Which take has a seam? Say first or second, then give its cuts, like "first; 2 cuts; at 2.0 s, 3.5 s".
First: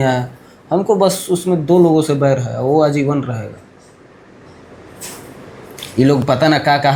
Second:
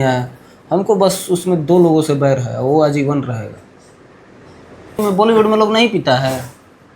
second; 1 cut; at 5.0 s